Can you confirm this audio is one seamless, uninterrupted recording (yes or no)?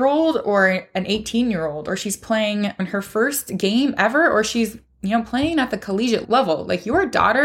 no